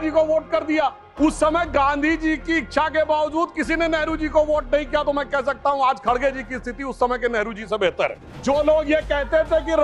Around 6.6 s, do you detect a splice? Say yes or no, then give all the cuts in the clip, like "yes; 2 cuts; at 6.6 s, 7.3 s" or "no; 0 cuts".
no; 2 cuts; at 1.1 s, 8.3 s